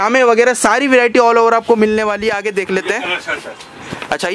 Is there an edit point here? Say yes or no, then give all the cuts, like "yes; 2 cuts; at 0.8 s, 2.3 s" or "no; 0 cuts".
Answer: no; 0 cuts